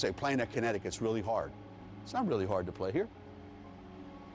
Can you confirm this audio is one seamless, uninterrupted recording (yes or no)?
yes